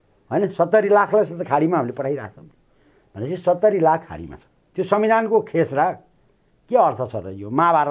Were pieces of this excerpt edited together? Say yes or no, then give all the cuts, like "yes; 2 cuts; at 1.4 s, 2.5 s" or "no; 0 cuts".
yes; 1 cut; at 4.6 s